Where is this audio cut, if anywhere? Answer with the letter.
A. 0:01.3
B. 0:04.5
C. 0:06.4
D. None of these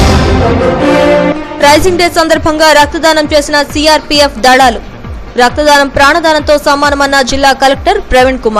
A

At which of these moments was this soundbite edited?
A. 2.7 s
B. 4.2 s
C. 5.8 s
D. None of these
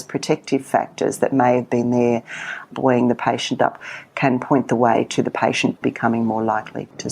C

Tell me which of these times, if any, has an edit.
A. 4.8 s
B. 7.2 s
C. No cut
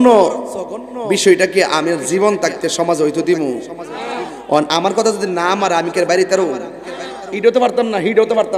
C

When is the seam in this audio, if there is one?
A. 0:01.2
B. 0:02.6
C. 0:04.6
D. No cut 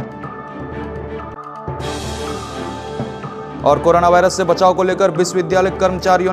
A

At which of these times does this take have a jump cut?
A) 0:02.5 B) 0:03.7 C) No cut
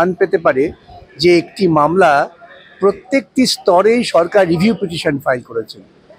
C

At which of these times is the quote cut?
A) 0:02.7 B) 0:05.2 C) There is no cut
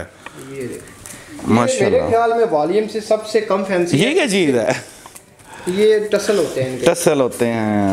C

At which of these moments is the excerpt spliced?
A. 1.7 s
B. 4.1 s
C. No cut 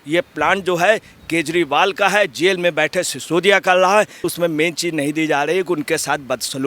B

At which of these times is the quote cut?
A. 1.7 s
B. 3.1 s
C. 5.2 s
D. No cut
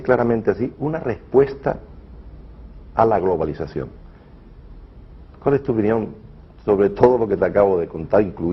A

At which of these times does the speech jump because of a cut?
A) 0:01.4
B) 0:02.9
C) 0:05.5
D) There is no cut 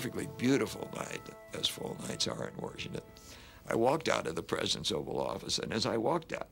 A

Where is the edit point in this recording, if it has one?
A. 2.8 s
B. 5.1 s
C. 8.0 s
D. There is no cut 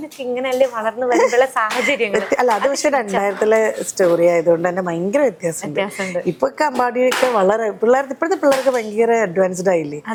D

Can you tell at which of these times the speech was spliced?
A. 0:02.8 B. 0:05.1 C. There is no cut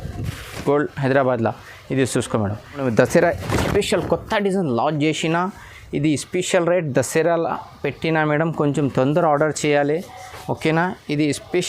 A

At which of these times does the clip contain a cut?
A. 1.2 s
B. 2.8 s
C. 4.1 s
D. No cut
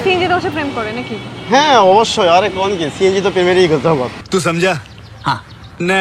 D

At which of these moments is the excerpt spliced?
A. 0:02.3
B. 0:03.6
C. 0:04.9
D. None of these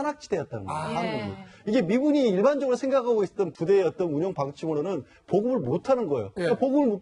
A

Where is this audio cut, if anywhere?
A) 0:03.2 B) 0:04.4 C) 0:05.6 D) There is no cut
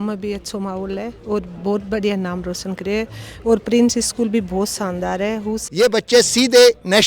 C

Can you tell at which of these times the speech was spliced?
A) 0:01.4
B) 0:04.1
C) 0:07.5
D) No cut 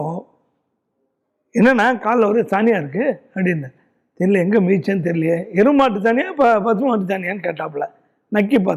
D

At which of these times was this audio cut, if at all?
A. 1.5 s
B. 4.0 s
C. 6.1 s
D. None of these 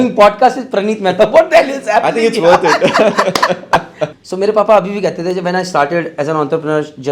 B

